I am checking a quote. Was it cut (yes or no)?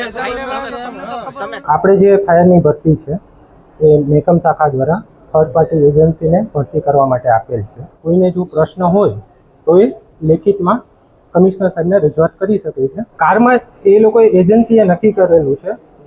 yes